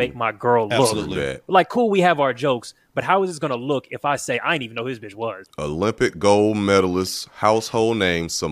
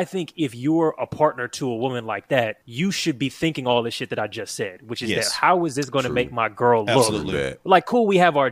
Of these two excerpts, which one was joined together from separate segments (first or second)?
second